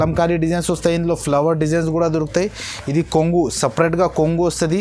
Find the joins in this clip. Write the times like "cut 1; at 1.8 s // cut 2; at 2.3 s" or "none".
none